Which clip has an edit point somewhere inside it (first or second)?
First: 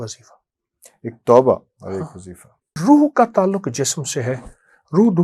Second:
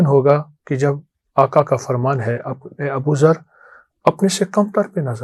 first